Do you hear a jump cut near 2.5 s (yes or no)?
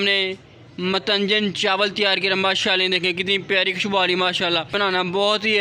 no